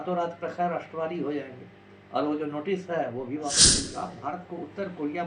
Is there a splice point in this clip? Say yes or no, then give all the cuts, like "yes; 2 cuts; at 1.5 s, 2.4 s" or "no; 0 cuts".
yes; 1 cut; at 3.9 s